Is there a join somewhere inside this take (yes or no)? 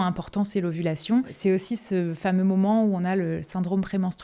yes